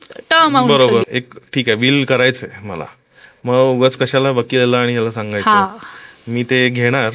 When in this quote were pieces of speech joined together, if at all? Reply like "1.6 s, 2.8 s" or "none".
1.2 s